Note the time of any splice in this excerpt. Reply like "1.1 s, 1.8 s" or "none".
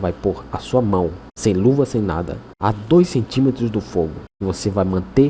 1.3 s, 2.4 s, 4.3 s